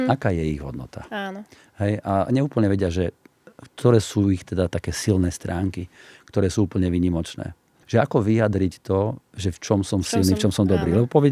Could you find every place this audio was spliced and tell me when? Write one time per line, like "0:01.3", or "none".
0:07.7

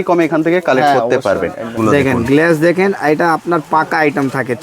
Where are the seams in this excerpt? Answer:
0:01.7

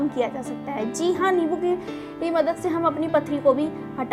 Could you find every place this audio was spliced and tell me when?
none

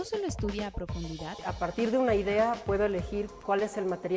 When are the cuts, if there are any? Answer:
0:01.4

